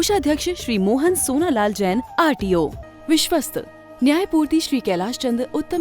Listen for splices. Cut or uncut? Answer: cut